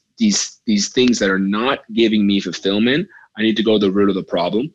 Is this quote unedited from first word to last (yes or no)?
yes